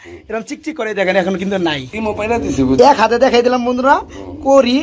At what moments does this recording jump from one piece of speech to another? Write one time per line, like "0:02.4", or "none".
0:01.9